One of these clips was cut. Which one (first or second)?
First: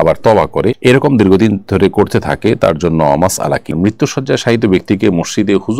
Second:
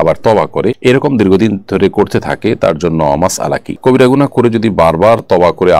first